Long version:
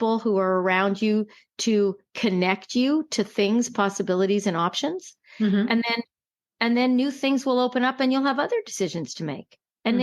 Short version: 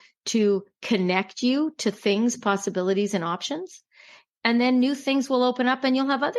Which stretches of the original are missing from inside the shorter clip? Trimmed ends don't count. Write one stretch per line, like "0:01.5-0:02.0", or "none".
0:05.3-0:06.1

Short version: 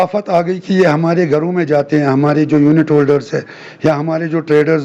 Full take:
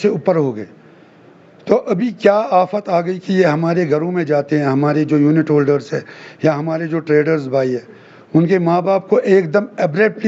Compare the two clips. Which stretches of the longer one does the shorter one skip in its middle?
none

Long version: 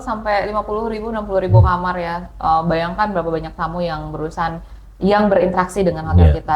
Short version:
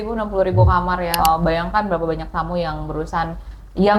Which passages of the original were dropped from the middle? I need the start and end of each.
0:02.1-0:02.4

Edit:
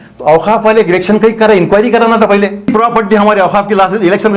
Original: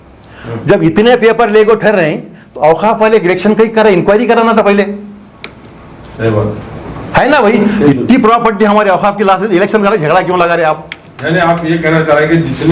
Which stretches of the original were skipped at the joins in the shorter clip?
0:05.0-0:08.2

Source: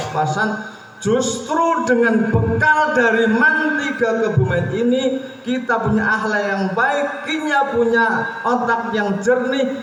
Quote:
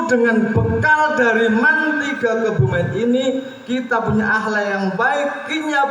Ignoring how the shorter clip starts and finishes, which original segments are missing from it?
none

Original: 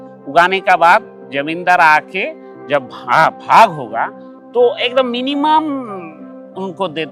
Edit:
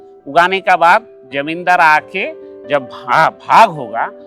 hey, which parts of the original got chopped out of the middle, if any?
none

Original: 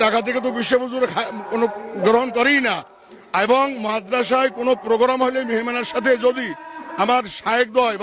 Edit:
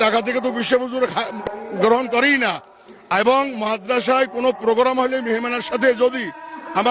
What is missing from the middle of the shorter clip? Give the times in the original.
0:01.5-0:01.7

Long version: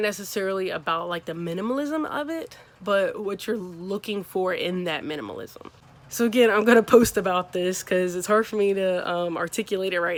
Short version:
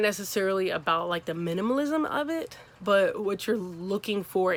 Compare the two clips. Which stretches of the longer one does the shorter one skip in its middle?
none

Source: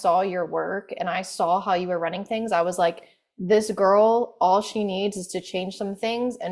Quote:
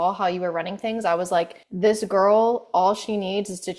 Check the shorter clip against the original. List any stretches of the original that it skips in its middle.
0:03.1-0:03.3

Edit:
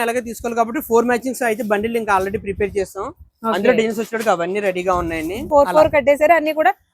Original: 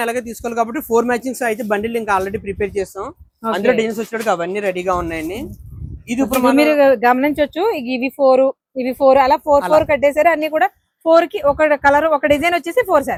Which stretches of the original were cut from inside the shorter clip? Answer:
0:05.5-0:09.4

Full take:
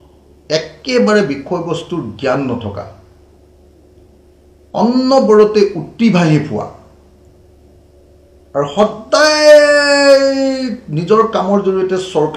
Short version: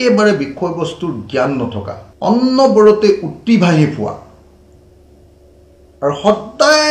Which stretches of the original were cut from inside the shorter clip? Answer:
0:02.9-0:04.5

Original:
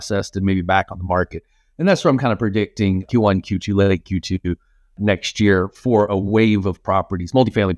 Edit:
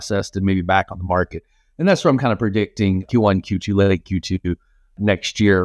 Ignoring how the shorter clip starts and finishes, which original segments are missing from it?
none

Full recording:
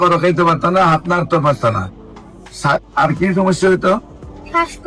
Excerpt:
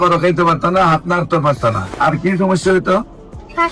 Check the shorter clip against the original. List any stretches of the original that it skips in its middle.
0:01.9-0:02.9

